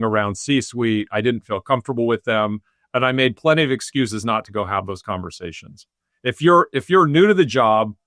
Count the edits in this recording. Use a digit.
0